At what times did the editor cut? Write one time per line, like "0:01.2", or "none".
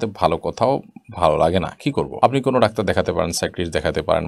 none